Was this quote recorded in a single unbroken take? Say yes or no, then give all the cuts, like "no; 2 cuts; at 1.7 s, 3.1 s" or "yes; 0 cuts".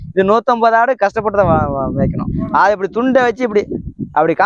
yes; 0 cuts